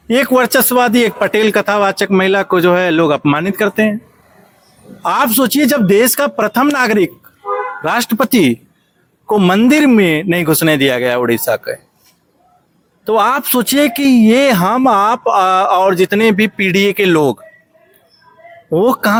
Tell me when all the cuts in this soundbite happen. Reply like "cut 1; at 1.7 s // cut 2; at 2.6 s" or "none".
none